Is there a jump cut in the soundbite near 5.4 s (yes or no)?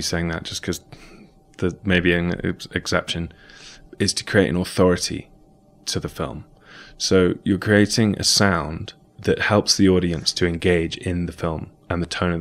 no